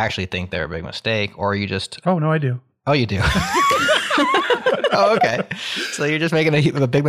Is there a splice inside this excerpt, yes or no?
no